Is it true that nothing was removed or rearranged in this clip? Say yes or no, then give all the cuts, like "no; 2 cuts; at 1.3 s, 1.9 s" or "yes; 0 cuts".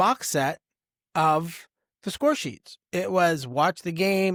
yes; 0 cuts